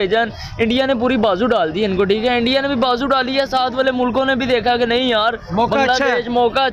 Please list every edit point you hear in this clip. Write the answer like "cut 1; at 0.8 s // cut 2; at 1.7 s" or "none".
none